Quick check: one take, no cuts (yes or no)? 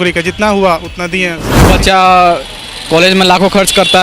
no